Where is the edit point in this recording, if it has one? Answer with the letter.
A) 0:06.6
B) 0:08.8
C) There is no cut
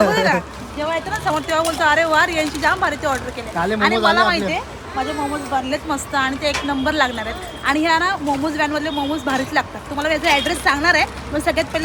C